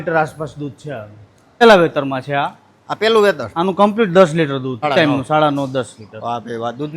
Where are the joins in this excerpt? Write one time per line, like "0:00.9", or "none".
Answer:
0:01.6
0:04.9